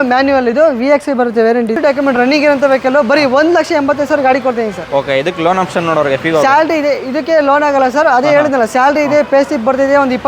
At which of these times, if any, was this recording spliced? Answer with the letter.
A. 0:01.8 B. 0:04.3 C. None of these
A